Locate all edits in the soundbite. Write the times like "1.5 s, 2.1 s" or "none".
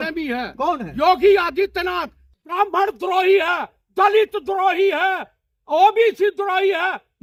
none